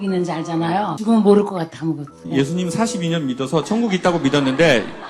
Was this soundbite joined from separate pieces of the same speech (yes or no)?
yes